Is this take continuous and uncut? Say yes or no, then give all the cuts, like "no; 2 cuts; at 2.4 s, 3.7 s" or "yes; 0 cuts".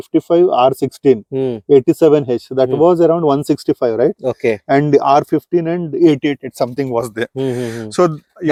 yes; 0 cuts